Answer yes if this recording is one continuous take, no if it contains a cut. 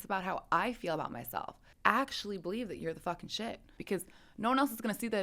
no